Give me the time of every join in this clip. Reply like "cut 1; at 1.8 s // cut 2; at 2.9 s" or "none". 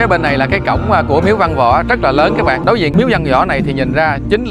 cut 1; at 2.7 s